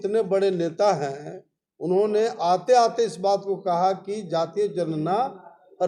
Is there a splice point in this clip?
no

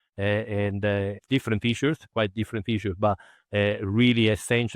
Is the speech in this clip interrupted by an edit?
yes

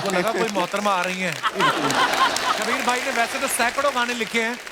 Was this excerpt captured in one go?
no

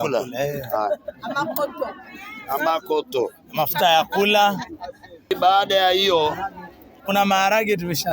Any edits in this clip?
yes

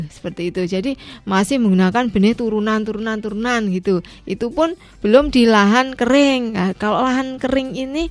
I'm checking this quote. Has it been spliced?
no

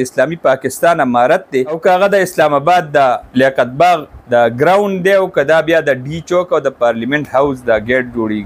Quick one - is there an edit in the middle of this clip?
yes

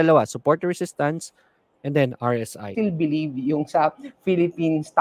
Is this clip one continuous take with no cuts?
no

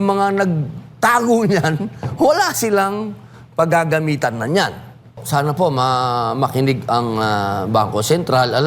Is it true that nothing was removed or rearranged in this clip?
no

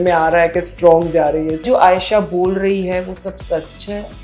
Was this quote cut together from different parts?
yes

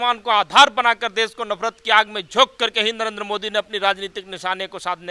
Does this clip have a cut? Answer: no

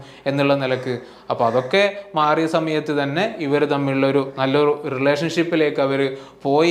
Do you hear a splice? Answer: no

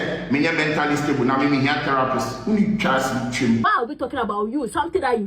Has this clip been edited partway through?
yes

